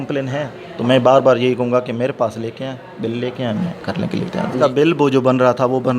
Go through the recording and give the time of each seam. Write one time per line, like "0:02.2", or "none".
0:04.5